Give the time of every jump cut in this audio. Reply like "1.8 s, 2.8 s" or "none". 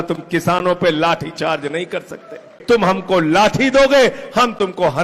2.5 s